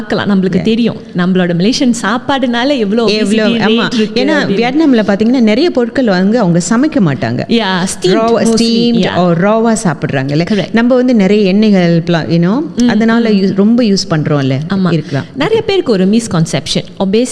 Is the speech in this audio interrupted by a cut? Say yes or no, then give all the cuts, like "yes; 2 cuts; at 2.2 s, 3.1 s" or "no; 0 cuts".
no; 0 cuts